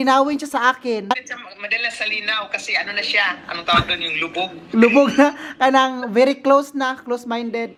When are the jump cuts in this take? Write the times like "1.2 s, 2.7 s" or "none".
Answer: none